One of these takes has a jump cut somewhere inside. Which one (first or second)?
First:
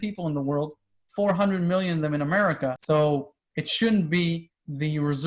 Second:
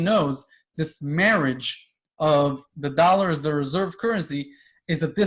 first